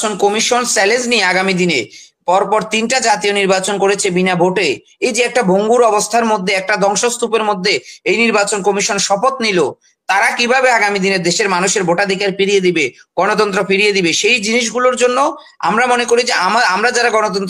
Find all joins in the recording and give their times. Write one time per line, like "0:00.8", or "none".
none